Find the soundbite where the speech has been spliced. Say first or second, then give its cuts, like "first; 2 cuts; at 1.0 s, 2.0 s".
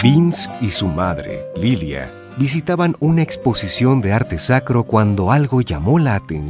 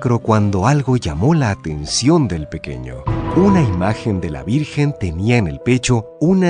second; 1 cut; at 3.3 s